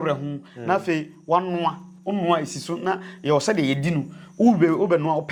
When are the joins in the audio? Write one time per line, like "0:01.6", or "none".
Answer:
none